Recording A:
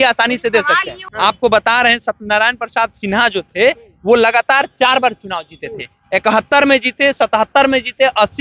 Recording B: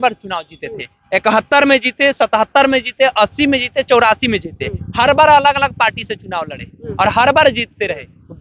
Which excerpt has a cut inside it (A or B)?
A